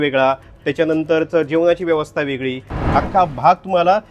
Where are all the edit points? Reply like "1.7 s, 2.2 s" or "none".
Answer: 2.7 s